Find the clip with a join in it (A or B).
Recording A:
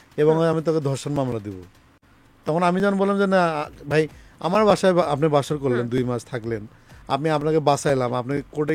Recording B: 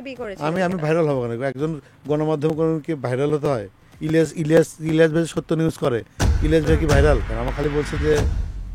B